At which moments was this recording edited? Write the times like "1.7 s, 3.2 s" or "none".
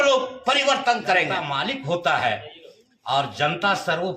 1.4 s